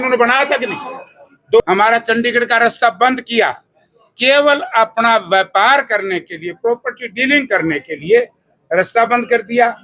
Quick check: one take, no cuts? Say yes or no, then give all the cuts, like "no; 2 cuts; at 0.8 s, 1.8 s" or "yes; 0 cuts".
no; 1 cut; at 1.6 s